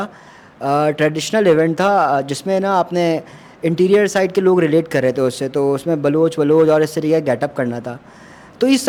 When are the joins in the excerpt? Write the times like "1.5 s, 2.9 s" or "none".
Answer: none